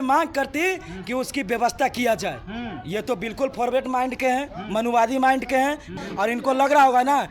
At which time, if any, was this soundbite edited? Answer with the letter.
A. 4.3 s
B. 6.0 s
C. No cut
B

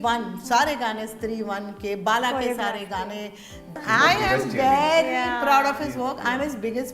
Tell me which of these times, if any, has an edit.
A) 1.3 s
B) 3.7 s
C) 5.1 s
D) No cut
B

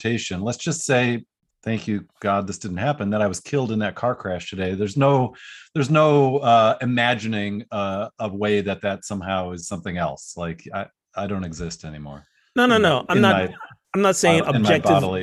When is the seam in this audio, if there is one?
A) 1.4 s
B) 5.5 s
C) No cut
A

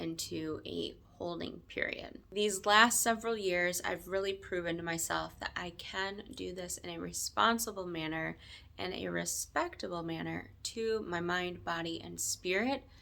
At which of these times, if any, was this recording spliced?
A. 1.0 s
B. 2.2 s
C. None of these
B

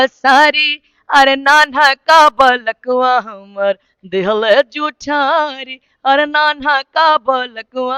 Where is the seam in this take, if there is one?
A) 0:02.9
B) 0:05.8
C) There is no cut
C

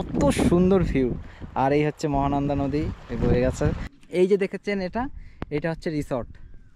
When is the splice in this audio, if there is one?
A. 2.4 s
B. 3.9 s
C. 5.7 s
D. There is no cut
B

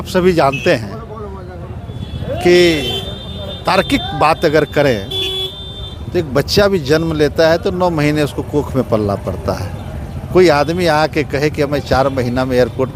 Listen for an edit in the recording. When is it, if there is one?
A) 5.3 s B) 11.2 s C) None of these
C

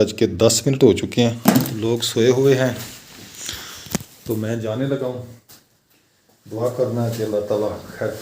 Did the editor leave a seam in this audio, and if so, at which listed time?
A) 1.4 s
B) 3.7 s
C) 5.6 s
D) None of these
A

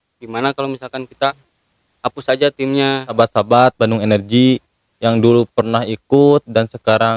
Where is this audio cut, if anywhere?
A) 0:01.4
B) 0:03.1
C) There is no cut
B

